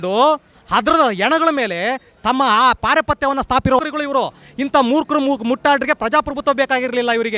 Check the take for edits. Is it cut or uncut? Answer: cut